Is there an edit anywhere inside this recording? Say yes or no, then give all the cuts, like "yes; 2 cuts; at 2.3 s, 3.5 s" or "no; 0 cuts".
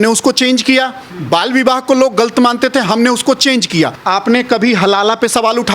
yes; 1 cut; at 4.0 s